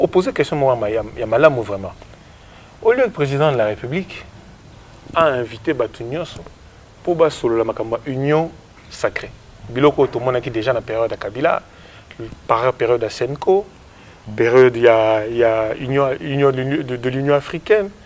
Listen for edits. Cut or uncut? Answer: uncut